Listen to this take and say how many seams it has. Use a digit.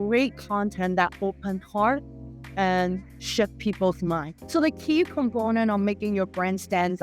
1